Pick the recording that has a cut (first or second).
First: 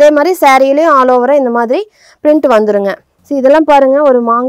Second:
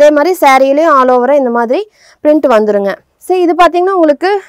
first